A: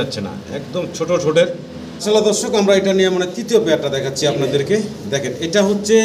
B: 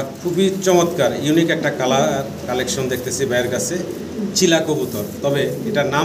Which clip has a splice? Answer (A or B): A